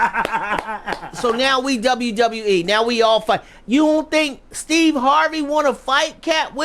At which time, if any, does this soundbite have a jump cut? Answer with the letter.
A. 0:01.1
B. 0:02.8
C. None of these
A